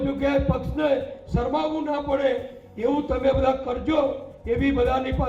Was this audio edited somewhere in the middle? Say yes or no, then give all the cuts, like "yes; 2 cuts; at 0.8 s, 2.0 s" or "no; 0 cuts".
no; 0 cuts